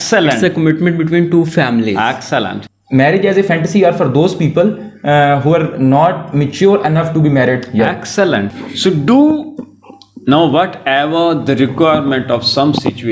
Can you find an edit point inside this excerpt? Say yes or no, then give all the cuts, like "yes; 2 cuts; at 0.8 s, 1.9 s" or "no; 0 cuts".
yes; 2 cuts; at 2.7 s, 8.5 s